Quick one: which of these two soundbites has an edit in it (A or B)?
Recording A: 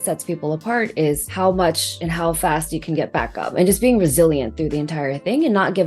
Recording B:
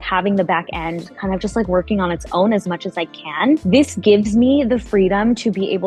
A